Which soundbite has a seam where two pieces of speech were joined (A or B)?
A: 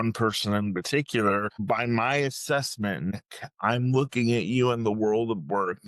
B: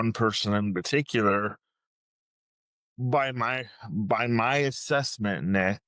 A